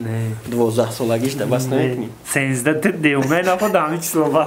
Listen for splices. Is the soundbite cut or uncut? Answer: uncut